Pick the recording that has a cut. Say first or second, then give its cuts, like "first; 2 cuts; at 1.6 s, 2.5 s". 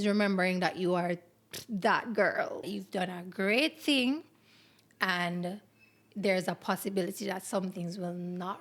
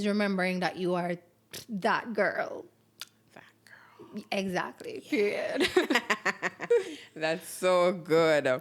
first; 1 cut; at 2.7 s